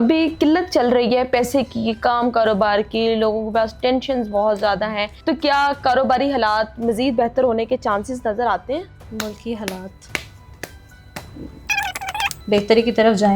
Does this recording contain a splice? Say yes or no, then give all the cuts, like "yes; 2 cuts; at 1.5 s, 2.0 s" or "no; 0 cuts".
yes; 3 cuts; at 5.1 s, 9.0 s, 11.9 s